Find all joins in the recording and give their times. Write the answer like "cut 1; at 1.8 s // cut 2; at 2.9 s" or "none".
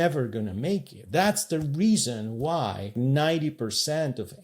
cut 1; at 1.0 s // cut 2; at 2.9 s